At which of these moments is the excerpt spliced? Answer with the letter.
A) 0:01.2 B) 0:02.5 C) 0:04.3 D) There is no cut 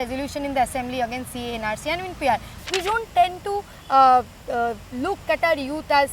B